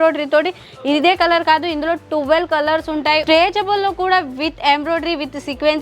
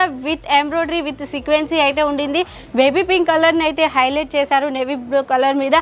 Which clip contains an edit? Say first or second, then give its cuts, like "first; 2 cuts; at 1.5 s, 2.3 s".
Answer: first; 1 cut; at 3.2 s